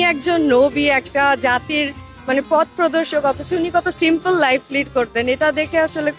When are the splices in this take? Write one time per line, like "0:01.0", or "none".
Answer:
none